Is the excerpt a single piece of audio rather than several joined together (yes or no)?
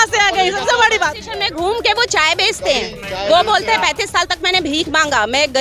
no